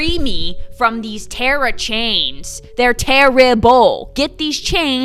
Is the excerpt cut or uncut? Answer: uncut